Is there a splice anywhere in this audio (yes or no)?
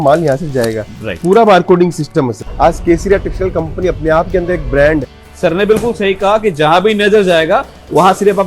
yes